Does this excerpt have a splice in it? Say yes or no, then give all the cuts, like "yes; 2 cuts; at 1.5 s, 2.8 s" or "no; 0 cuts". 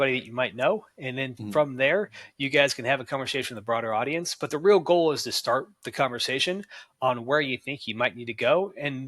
no; 0 cuts